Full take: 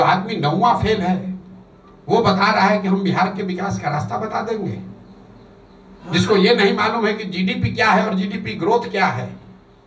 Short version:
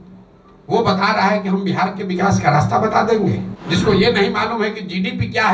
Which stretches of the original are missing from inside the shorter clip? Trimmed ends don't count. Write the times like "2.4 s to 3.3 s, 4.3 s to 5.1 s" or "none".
4.9 s to 6.0 s